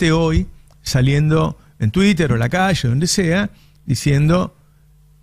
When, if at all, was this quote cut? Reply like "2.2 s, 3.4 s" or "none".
none